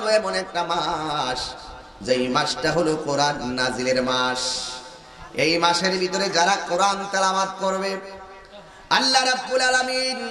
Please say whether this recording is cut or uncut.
uncut